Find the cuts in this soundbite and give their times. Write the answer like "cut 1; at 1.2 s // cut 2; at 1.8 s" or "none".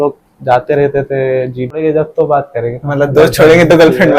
cut 1; at 1.8 s